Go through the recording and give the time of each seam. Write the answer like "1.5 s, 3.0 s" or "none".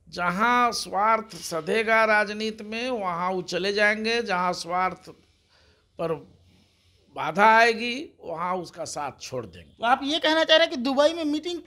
9.6 s